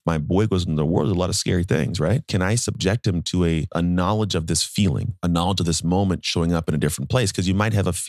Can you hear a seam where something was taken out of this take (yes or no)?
yes